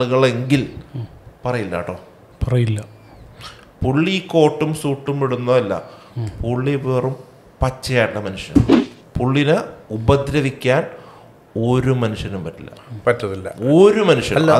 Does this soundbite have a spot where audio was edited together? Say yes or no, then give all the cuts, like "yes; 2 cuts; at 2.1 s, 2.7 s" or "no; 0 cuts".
yes; 1 cut; at 8.8 s